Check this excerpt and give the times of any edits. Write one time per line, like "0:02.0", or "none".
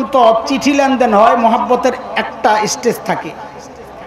none

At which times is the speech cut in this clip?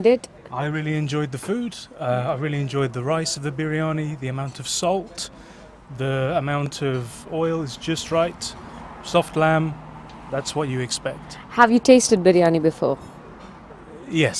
none

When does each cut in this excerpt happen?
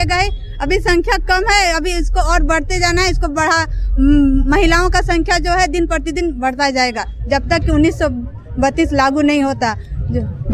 none

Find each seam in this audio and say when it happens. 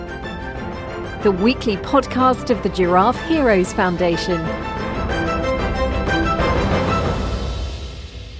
none

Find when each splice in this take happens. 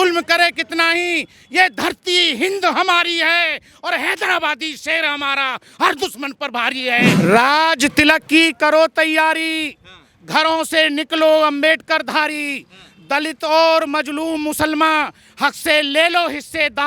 0:07.1

